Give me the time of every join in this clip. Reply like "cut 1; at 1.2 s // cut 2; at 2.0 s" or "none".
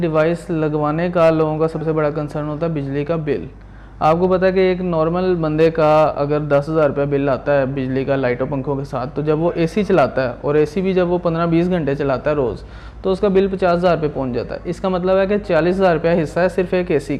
none